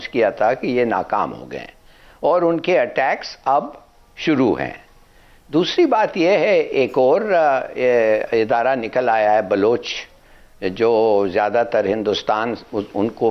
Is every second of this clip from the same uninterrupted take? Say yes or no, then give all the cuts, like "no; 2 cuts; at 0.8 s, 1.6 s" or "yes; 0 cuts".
yes; 0 cuts